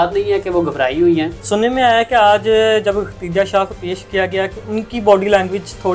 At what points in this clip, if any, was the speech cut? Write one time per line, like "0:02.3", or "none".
0:01.4